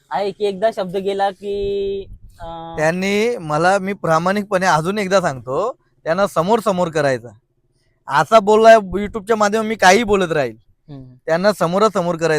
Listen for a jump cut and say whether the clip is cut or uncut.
uncut